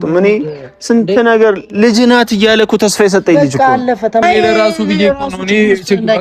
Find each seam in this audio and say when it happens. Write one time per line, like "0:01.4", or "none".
0:04.2